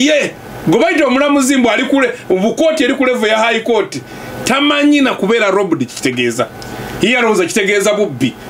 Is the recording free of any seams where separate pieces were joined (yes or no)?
yes